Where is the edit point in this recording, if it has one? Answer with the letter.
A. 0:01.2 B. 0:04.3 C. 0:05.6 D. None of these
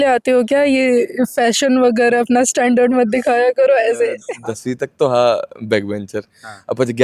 B